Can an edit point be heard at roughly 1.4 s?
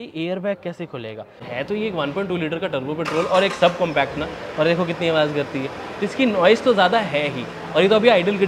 yes; 1 cut; at 1.4 s

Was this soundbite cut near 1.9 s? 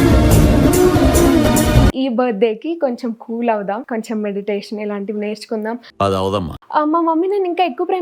yes; 2 cuts; at 1.9 s, 6.6 s

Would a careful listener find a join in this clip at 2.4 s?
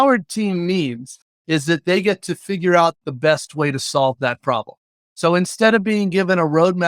no; 0 cuts

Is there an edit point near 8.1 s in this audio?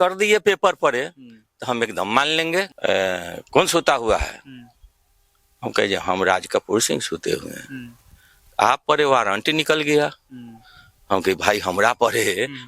no; 1 cut; at 2.7 s

